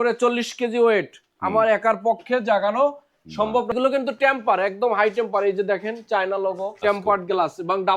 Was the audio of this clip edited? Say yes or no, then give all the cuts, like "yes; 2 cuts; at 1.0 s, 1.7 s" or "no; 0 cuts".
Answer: yes; 2 cuts; at 3.7 s, 6.8 s